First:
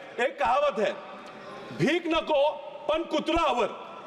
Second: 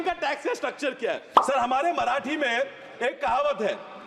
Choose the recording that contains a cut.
second; 1 cut; at 1.3 s

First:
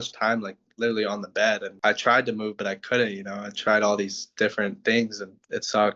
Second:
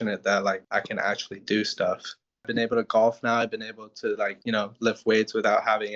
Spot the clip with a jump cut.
second; 1 cut; at 2.5 s

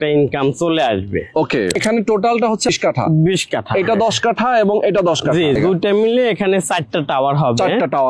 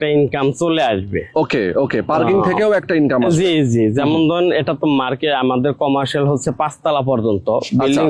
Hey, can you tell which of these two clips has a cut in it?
first; 3 cuts; at 1.7 s, 2.7 s, 5.6 s

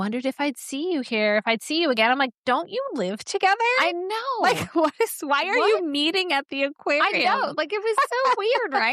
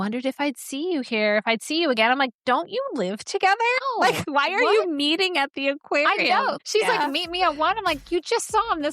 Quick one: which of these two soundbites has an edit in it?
second; 2 cuts; at 4.2 s, 6.6 s

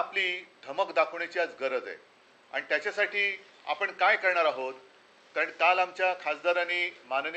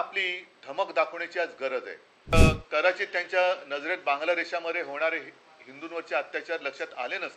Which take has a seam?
second; 1 cut; at 2.3 s

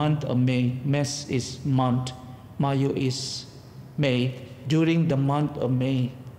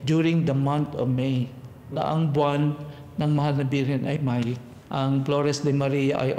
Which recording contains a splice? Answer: second; 1 cut; at 4.8 s

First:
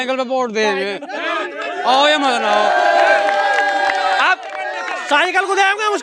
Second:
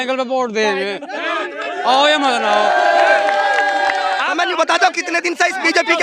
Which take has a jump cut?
second; 1 cut; at 4.3 s

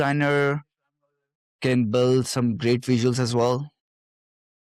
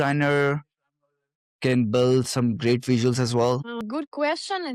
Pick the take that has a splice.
second; 1 cut; at 3.8 s

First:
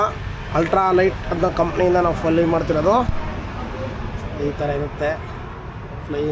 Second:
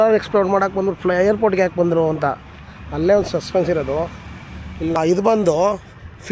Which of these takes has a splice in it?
second; 1 cut; at 5.0 s

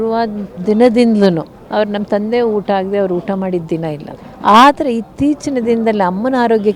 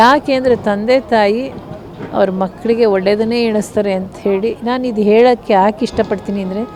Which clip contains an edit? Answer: first; 2 cuts; at 1.6 s, 4.2 s

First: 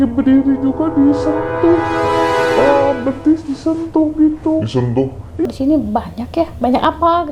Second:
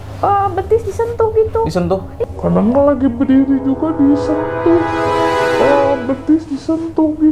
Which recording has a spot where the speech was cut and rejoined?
first; 1 cut; at 5.5 s

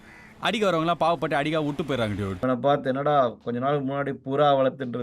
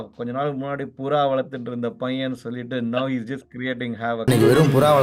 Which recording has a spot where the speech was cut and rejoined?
first; 1 cut; at 2.3 s

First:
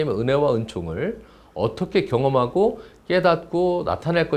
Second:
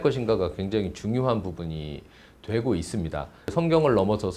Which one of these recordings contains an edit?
second; 1 cut; at 3.5 s

